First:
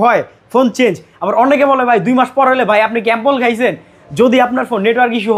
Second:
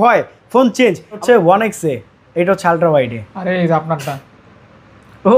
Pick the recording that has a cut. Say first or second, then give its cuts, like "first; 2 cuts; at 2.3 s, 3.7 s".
second; 1 cut; at 1.2 s